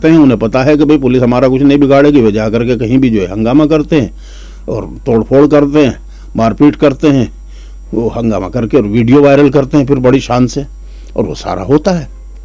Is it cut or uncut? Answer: uncut